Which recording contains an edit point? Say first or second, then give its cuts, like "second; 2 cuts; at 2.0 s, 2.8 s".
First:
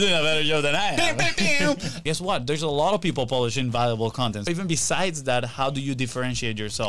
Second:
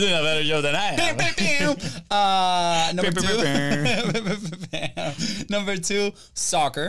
first; 2 cuts; at 2.0 s, 4.5 s